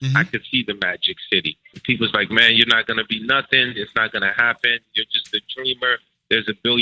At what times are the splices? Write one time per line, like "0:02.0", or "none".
0:01.8